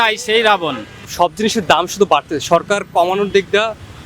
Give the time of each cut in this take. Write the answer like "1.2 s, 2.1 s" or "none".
0.9 s